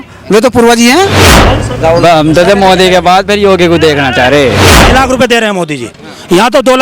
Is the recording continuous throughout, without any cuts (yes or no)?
no